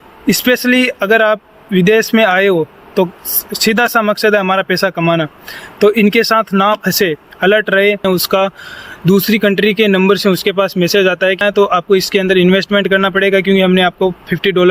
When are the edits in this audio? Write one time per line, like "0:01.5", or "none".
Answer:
0:08.0
0:11.4